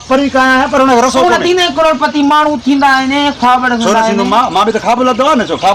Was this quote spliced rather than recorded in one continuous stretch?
no; 0 cuts

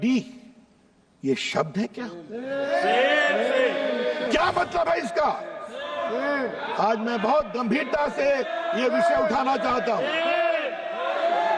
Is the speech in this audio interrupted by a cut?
yes; 1 cut; at 4.3 s

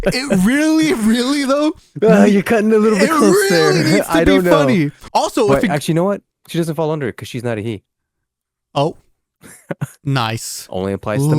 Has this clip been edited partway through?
yes; 1 cut; at 5.0 s

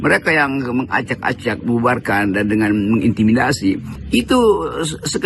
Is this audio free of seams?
no; 1 cut; at 3.9 s

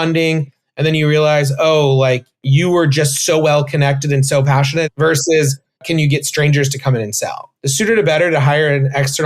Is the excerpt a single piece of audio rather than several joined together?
no; 3 cuts; at 4.9 s, 5.8 s, 7.5 s

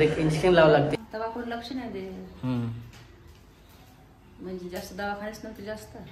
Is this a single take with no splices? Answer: no; 1 cut; at 1.0 s

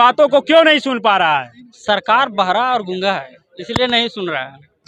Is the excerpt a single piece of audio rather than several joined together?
yes; 0 cuts

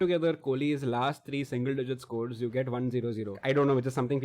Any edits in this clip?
yes; 1 cut; at 3.3 s

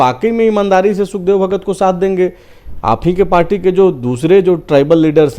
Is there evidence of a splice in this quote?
no; 0 cuts

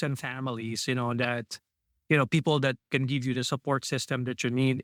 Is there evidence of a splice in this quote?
no; 0 cuts

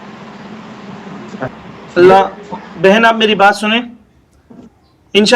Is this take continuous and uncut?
no; 1 cut; at 1.5 s

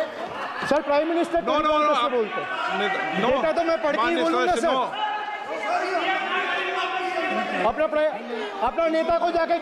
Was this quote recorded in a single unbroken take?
yes; 0 cuts

